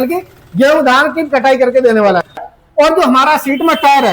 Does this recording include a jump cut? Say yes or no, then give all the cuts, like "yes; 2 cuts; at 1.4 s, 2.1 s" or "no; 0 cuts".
yes; 1 cut; at 2.4 s